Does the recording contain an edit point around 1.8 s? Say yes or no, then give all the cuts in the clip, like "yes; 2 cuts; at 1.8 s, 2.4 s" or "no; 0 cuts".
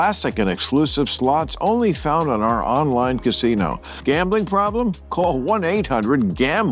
no; 1 cut; at 3.9 s